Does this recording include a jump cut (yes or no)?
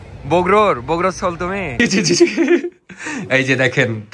yes